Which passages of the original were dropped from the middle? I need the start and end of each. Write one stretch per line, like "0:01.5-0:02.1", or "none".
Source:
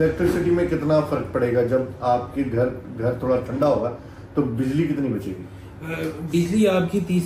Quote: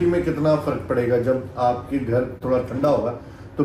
0:02.8-0:03.2